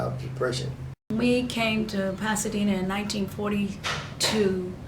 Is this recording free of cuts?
no; 1 cut; at 0.9 s

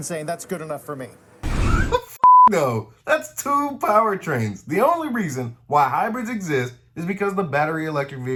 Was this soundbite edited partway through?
no; 0 cuts

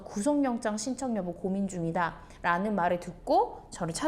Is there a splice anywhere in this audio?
no; 0 cuts

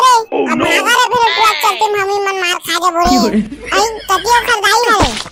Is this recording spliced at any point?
no; 0 cuts

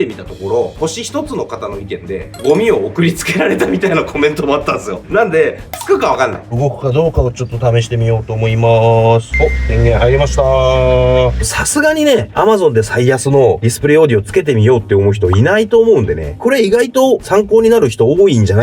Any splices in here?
yes; 6 cuts; at 2.2 s, 5.0 s, 6.5 s, 9.3 s, 11.4 s, 16.4 s

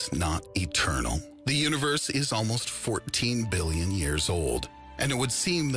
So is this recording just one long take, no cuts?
yes; 0 cuts

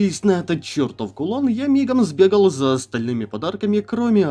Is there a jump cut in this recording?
no; 0 cuts

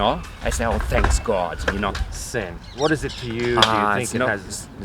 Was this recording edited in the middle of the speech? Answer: yes; 1 cut; at 2.0 s

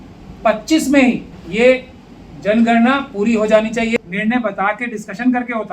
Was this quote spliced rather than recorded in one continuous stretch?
yes; 2 cuts; at 1.4 s, 4.0 s

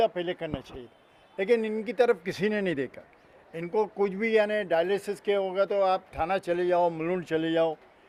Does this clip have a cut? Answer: no; 0 cuts

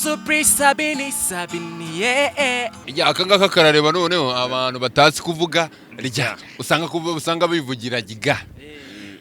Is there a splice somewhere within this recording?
yes; 1 cut; at 2.8 s

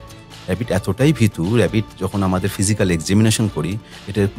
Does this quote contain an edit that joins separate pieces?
no; 0 cuts

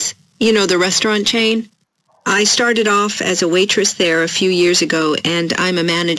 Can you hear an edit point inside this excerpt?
yes; 2 cuts; at 4.1 s, 5.2 s

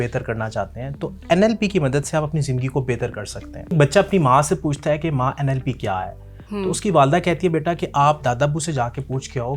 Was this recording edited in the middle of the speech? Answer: yes; 1 cut; at 3.7 s

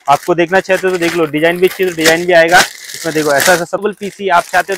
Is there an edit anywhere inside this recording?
yes; 1 cut; at 3.8 s

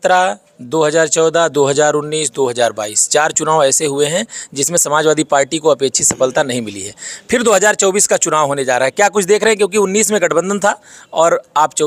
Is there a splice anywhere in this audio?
no; 0 cuts

